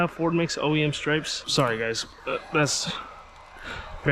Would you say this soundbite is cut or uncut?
cut